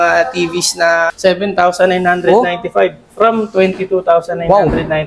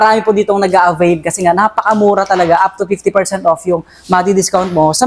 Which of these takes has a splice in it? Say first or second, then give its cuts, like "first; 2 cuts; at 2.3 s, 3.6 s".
first; 1 cut; at 1.1 s